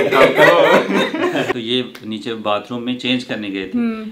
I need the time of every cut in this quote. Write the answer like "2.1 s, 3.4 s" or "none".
1.5 s